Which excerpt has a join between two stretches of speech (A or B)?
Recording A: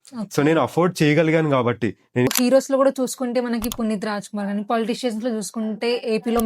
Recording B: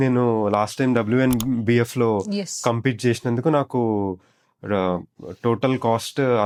A